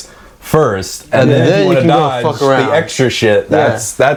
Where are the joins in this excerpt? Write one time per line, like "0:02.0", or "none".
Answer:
none